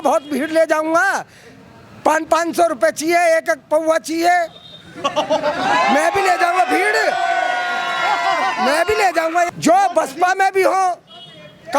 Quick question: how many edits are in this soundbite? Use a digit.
0